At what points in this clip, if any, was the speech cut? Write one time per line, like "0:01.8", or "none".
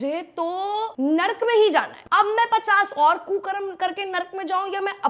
0:00.9
0:02.0